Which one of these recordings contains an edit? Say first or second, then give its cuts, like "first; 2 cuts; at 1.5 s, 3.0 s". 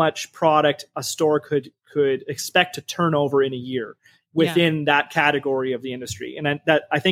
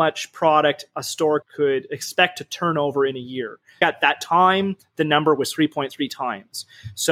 second; 2 cuts; at 1.4 s, 3.8 s